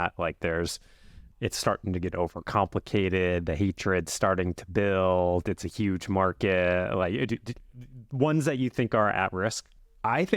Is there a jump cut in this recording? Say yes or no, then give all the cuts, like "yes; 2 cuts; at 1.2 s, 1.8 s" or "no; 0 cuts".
no; 0 cuts